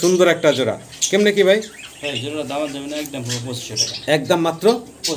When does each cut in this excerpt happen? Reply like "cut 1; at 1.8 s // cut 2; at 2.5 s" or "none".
none

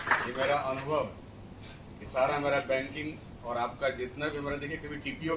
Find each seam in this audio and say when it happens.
none

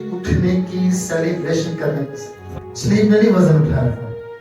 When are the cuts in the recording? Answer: cut 1; at 2.5 s

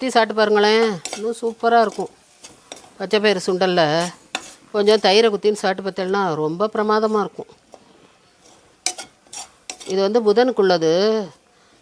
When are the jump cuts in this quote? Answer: none

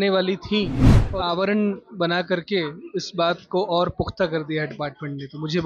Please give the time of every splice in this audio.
cut 1; at 1.1 s

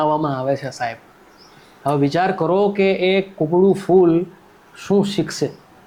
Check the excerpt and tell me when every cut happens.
none

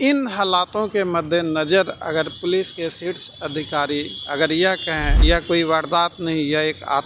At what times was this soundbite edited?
cut 1; at 5.1 s

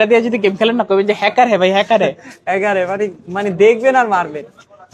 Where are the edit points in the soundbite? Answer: none

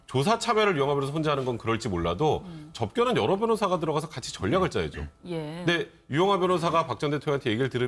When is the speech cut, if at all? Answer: none

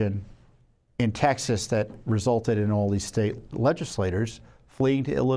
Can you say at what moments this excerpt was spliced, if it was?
cut 1; at 3.5 s

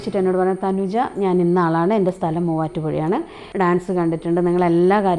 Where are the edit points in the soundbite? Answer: cut 1; at 3.4 s

